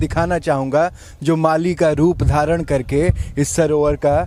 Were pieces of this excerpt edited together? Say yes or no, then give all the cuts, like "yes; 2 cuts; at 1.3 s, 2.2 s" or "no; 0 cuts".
no; 0 cuts